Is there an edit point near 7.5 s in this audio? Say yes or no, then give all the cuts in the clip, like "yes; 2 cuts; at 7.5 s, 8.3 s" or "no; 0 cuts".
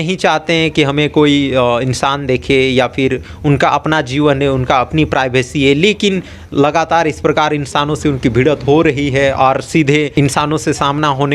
no; 1 cut; at 10.1 s